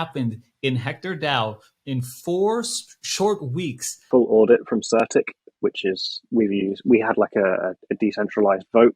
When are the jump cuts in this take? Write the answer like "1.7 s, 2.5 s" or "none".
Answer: 4.0 s